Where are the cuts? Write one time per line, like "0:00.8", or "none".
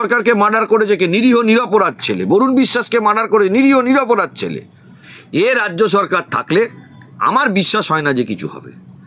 0:05.5